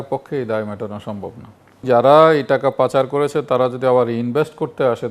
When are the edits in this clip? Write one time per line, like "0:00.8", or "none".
0:01.8